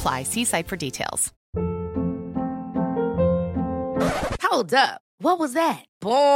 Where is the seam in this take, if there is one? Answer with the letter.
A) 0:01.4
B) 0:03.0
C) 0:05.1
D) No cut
A